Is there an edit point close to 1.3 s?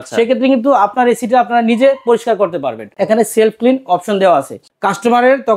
no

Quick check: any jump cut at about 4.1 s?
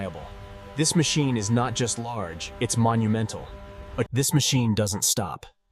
yes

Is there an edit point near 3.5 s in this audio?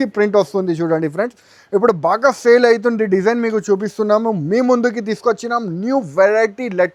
no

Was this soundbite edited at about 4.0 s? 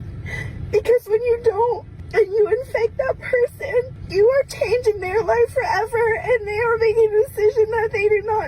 yes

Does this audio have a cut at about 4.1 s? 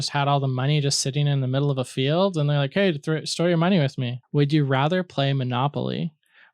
yes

